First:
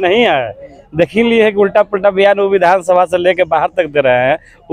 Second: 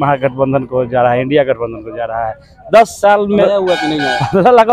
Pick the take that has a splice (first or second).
second